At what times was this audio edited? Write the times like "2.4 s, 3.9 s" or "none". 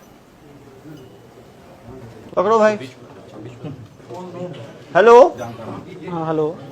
2.1 s